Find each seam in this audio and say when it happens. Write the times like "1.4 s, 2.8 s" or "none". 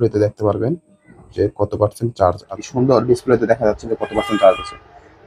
2.5 s